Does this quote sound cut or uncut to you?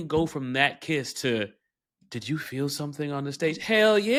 uncut